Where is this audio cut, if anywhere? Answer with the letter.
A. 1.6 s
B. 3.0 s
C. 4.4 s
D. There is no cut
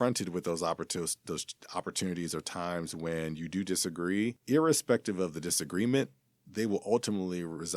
C